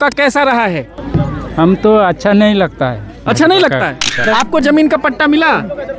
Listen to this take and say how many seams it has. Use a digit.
2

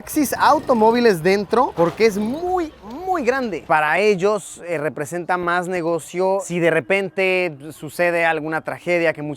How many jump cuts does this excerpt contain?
2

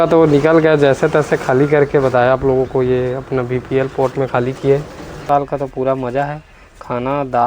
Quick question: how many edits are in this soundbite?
1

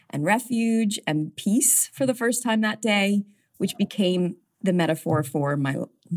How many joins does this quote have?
2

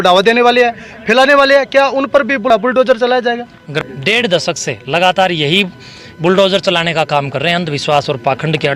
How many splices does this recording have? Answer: 2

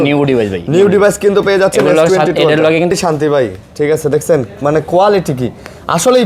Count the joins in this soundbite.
1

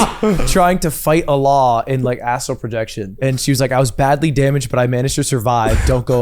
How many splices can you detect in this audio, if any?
1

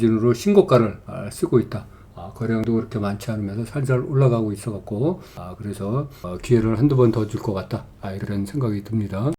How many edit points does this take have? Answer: 1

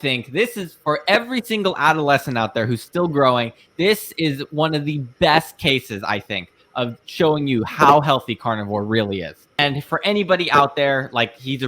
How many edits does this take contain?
1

